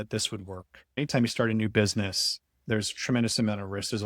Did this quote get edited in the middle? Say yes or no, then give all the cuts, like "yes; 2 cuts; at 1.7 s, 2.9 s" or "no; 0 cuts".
yes; 1 cut; at 0.9 s